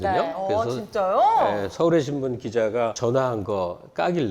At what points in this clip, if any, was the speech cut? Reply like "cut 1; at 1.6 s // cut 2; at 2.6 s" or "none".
cut 1; at 3.0 s